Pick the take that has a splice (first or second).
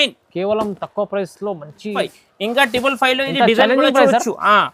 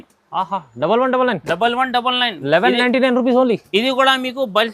first